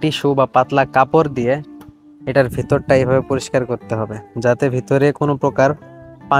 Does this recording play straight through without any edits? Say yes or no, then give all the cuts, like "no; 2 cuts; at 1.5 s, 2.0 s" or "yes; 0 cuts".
yes; 0 cuts